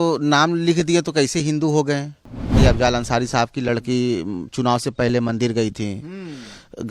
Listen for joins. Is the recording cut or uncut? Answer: cut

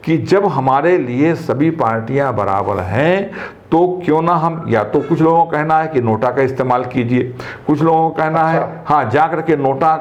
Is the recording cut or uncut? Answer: uncut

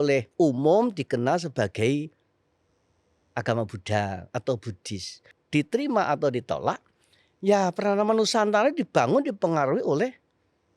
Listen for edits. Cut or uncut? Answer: cut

